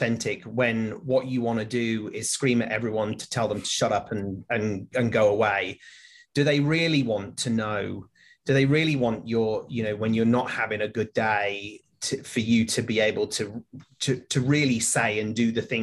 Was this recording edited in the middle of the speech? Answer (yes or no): no